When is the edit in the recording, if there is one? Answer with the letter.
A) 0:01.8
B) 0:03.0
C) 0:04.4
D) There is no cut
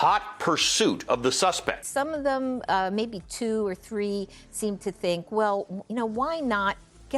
A